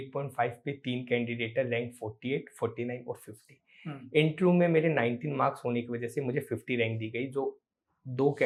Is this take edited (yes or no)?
no